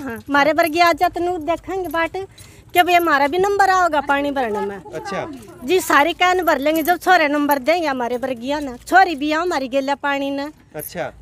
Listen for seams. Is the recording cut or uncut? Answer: uncut